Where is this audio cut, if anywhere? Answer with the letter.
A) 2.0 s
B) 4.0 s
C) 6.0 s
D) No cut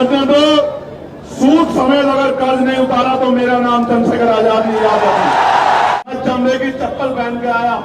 C